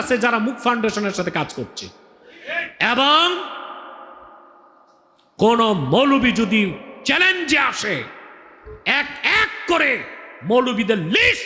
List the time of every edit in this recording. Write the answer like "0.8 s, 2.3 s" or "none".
none